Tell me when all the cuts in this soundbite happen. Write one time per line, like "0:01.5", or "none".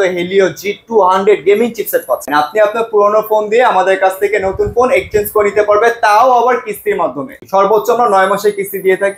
0:02.3
0:07.4